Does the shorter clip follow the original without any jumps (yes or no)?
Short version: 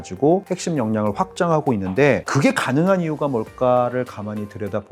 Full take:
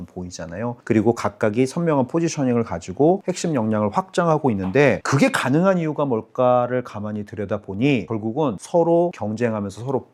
yes